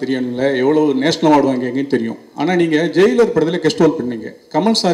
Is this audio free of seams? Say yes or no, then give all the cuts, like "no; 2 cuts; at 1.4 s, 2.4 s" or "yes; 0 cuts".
yes; 0 cuts